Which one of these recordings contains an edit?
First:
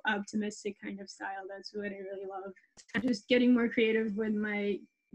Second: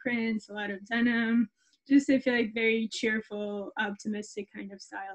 first; 1 cut; at 2.9 s

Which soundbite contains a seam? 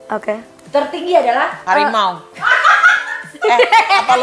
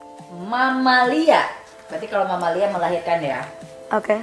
first; 1 cut; at 1.7 s

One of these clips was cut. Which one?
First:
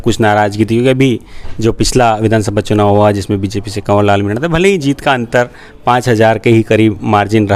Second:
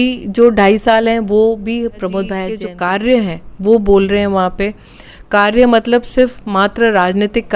second; 1 cut; at 2.6 s

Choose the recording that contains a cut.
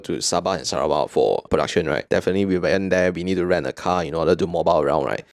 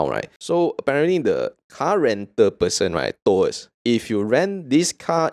first; 1 cut; at 1.7 s

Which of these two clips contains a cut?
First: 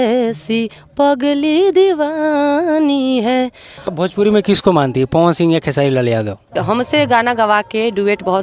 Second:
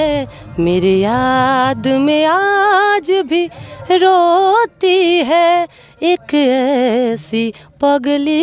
first; 2 cuts; at 3.8 s, 6.6 s

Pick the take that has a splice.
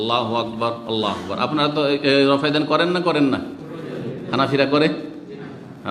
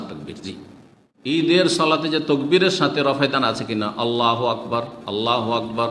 second; 1 cut; at 1.2 s

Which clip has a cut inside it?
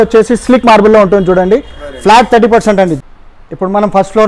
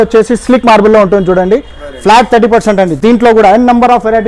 first; 1 cut; at 2.9 s

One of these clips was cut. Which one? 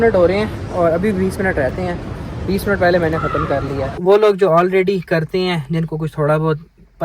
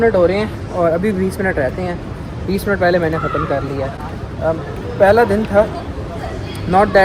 first; 1 cut; at 3.9 s

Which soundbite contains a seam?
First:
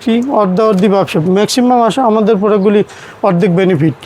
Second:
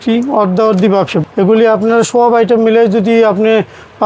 second; 1 cut; at 1.2 s

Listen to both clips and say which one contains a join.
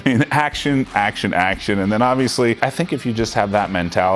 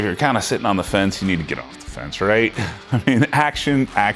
first; 1 cut; at 2.6 s

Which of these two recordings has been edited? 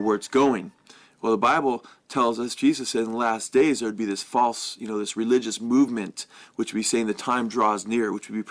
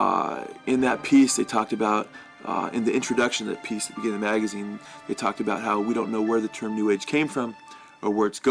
second; 1 cut; at 2.7 s

